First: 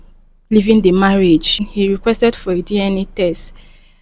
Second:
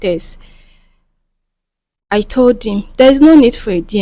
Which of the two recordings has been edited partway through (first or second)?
first